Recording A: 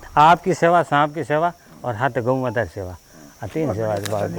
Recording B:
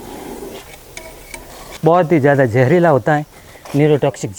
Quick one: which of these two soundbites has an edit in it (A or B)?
B